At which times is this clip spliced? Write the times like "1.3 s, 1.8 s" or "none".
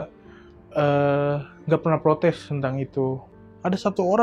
3.2 s